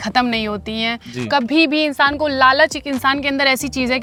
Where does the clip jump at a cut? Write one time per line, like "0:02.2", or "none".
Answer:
none